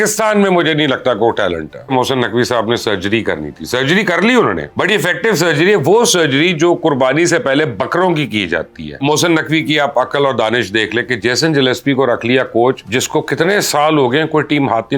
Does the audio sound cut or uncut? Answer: cut